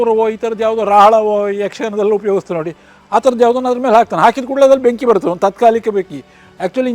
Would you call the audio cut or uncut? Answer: uncut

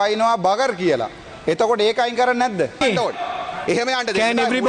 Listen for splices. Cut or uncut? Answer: cut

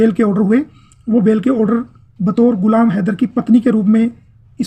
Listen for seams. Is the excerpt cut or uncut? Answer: uncut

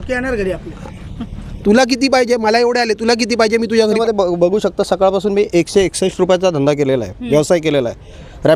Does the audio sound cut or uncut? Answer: cut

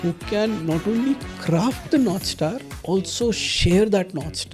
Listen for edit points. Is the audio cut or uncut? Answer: cut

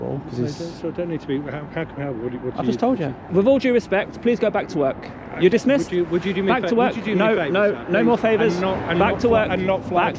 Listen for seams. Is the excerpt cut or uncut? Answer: cut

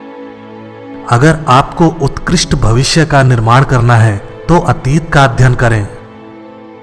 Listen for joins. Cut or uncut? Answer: uncut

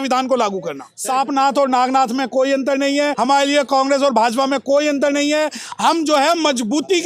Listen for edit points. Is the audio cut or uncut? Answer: cut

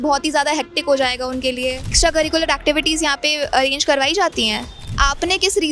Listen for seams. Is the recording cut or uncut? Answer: cut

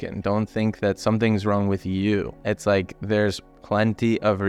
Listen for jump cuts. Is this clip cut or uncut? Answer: cut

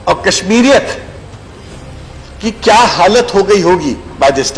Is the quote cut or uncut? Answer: uncut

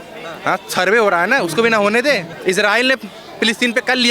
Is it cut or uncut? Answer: cut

